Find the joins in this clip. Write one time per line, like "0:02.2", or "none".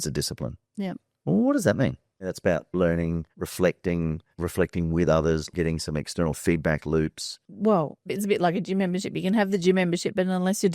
0:02.3
0:05.5
0:07.3